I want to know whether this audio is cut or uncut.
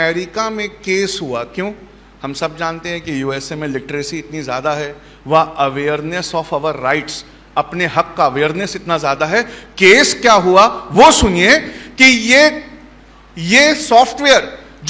uncut